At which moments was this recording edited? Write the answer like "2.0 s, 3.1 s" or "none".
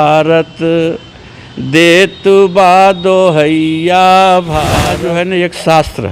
4.9 s